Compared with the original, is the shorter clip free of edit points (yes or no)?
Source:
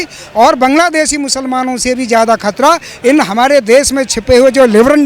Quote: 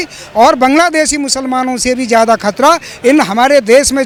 yes